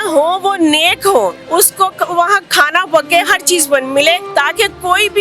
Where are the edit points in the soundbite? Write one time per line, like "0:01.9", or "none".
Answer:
0:01.4
0:04.2